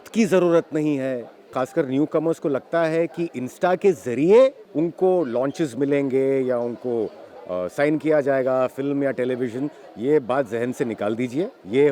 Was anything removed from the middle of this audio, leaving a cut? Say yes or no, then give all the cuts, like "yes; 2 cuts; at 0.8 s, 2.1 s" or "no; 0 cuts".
yes; 1 cut; at 1.5 s